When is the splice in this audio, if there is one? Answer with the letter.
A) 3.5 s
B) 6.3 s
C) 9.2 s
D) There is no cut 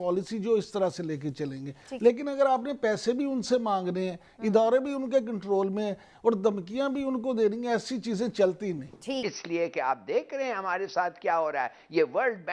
C